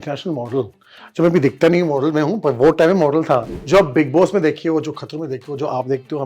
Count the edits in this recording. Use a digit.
1